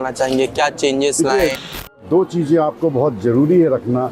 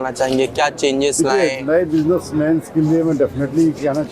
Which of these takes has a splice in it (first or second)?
first